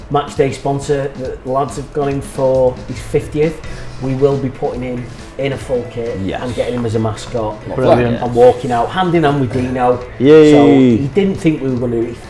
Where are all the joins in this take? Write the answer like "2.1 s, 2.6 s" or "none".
none